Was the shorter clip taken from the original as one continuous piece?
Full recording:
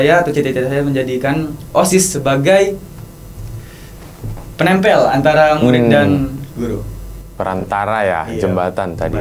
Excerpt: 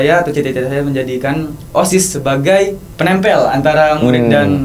no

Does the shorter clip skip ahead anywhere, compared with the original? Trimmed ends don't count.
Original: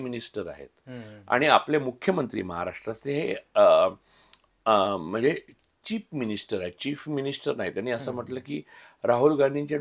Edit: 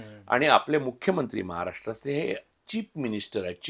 yes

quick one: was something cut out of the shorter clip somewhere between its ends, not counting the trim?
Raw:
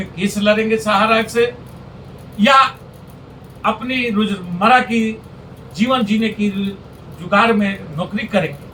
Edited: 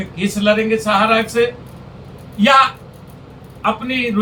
no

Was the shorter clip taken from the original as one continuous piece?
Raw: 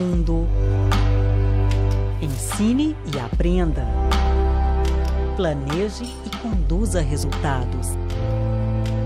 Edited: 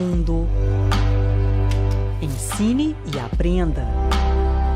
yes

